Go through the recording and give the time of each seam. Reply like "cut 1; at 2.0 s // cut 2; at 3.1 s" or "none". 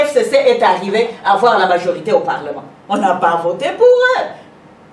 none